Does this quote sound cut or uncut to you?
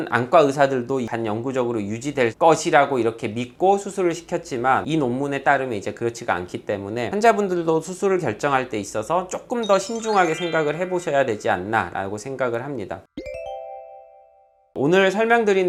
uncut